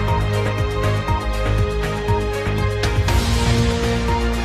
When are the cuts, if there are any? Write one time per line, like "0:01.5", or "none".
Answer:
0:02.9